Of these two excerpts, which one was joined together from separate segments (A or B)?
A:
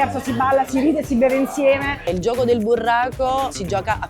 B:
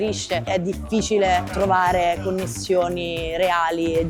A